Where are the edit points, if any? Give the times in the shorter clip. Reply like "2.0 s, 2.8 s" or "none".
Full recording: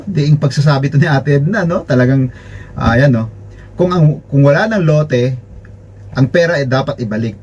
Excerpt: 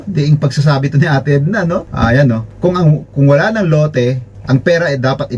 1.9 s, 4.3 s